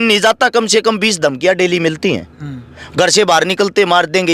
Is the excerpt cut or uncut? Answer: uncut